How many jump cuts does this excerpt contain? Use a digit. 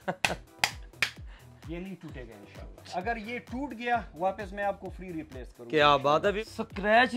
2